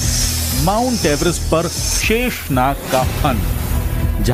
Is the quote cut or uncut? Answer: uncut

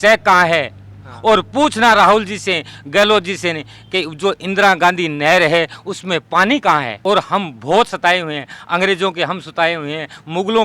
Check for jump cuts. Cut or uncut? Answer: cut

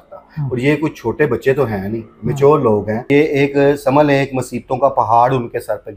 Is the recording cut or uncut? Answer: cut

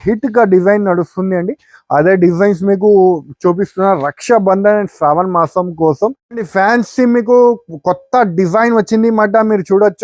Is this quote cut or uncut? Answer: cut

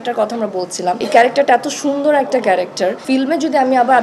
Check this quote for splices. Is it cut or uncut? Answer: cut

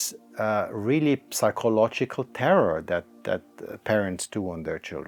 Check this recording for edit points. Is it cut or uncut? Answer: uncut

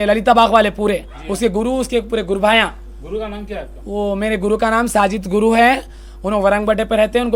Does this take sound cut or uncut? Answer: uncut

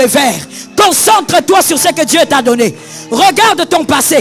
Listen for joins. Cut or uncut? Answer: uncut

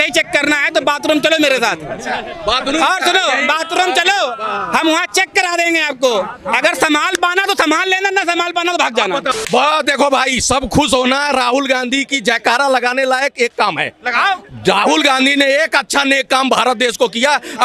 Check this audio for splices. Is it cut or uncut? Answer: cut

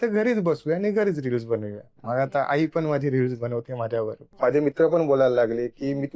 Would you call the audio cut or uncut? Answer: cut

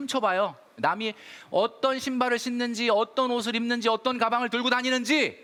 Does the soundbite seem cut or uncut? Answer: uncut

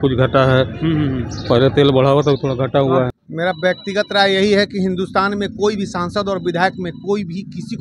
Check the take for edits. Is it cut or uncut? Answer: cut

